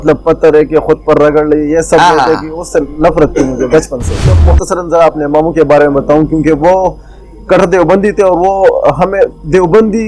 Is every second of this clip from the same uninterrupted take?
no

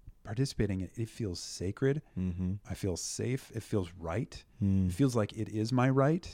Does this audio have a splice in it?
no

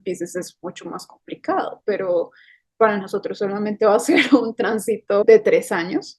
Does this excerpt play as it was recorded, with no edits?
no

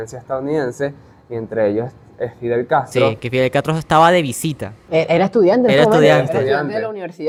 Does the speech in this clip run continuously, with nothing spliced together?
yes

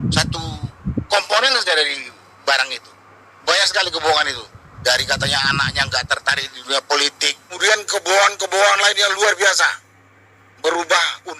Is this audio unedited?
no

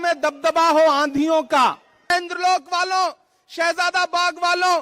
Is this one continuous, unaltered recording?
no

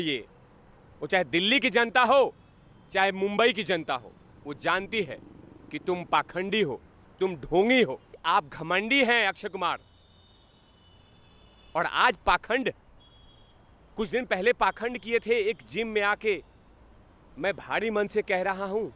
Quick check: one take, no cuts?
no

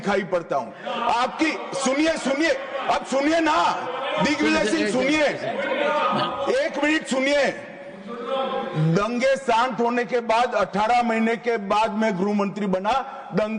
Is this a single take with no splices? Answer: yes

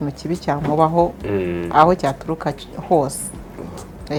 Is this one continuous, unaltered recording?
yes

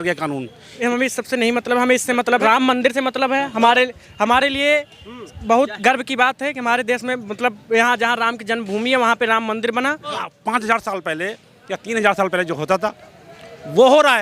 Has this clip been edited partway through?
yes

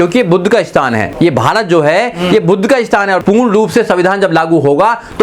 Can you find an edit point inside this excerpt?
yes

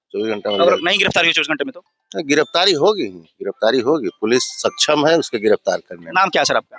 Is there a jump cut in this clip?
no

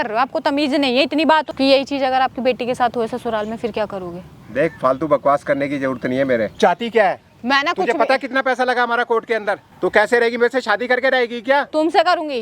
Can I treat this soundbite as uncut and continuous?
no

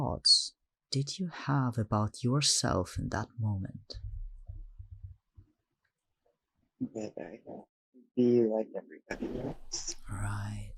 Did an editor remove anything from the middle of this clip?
no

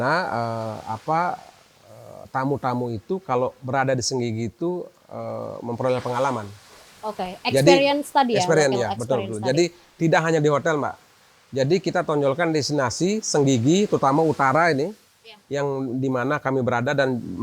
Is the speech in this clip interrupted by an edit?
no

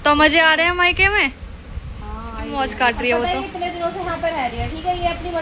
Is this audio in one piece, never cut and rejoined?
no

